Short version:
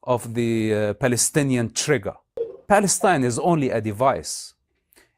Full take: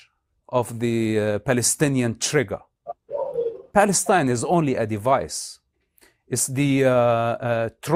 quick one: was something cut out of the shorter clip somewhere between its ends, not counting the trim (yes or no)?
yes